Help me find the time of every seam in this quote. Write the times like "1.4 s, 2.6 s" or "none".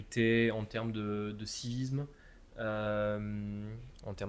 none